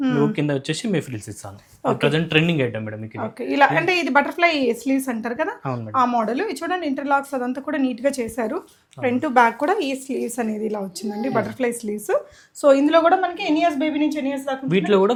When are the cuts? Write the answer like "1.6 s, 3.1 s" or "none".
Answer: none